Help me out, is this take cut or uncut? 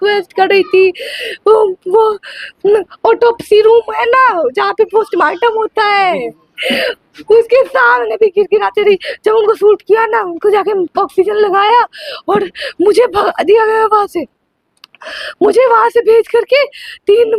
uncut